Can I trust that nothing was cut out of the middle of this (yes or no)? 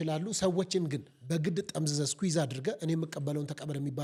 yes